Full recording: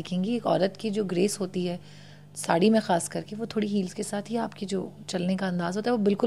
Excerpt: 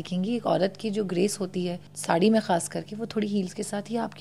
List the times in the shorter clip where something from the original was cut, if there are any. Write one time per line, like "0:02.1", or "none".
0:01.9

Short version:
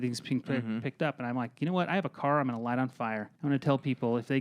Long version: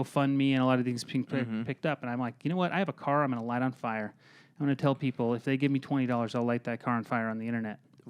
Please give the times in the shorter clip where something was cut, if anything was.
0:03.3

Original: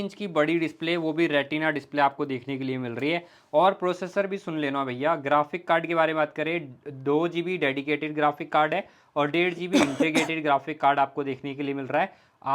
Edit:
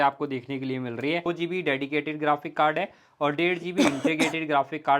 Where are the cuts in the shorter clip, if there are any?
0:01.3

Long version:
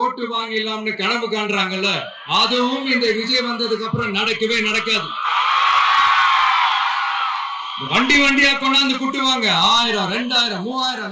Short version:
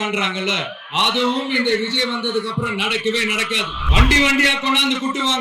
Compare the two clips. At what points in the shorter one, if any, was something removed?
0:03.8

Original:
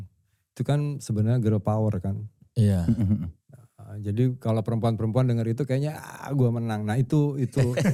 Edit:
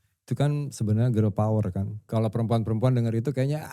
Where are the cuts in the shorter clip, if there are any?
0:02.1

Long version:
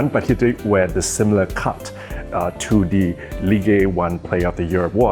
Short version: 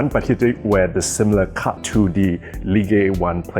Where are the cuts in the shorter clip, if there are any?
0:01.8

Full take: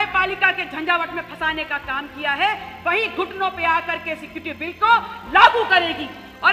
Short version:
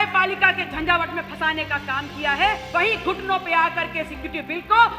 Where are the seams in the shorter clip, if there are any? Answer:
0:02.6

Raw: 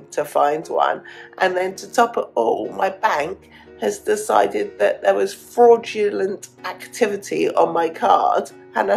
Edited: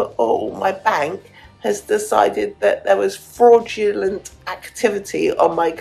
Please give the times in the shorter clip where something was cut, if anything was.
none

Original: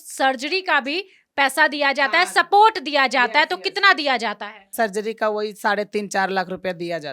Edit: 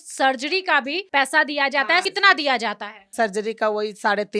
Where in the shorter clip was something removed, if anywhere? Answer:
0:01.0
0:02.1

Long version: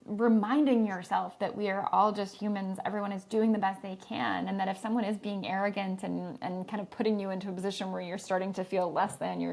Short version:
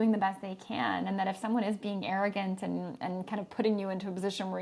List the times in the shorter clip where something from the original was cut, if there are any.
none

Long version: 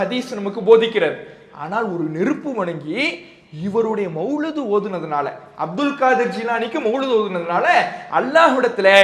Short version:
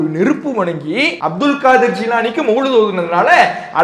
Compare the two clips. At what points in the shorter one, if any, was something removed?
0:01.2

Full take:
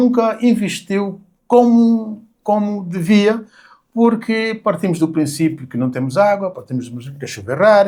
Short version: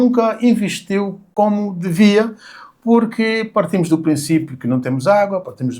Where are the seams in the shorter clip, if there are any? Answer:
0:01.2

